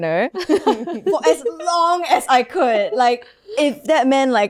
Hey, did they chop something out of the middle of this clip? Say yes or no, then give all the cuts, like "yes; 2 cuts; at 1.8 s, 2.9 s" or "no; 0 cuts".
no; 0 cuts